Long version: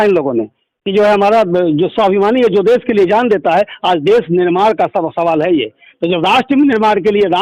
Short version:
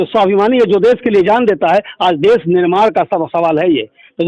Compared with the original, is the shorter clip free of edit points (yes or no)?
yes